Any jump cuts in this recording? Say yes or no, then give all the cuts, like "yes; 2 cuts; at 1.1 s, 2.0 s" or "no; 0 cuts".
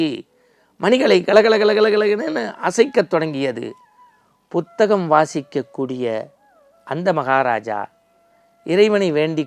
no; 0 cuts